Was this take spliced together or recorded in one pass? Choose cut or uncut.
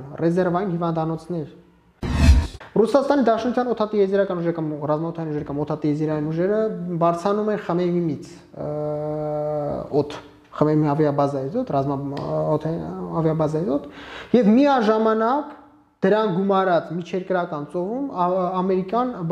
cut